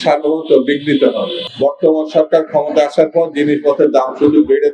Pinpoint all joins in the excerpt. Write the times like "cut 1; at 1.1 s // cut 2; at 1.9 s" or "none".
cut 1; at 1.4 s